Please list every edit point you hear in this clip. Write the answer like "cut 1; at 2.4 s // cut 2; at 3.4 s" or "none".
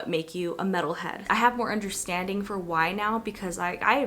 cut 1; at 1.1 s

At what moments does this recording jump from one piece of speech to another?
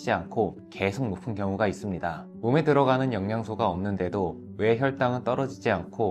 cut 1; at 2.3 s

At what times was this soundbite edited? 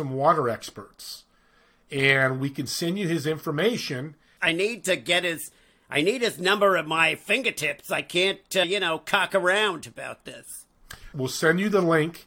cut 1; at 4.3 s // cut 2; at 8.6 s // cut 3; at 11.0 s

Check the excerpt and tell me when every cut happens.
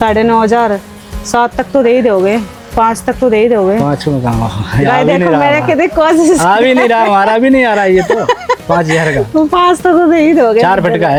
none

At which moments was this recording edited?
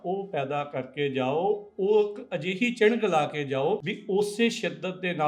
cut 1; at 3.9 s

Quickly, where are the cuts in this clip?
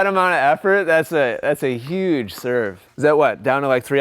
cut 1; at 2.8 s

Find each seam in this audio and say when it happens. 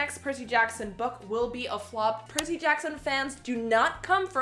cut 1; at 2.2 s

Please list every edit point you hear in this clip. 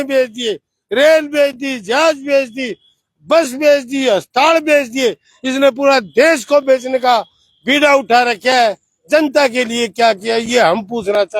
none

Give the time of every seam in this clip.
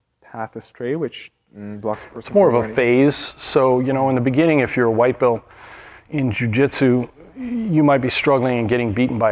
none

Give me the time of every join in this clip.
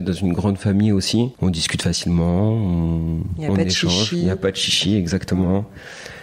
cut 1; at 1.3 s

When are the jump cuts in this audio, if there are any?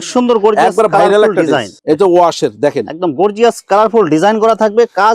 cut 1; at 1.7 s

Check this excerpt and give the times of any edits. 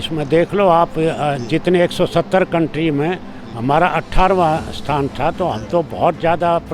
none

